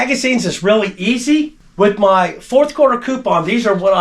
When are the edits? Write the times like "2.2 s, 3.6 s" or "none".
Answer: 1.6 s